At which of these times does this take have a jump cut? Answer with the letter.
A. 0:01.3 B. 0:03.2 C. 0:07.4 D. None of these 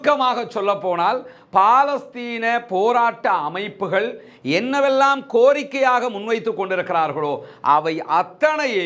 D